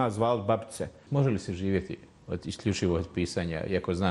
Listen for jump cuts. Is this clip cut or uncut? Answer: cut